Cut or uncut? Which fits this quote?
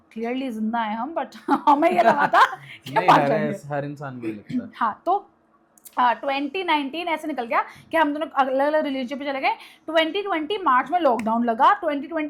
uncut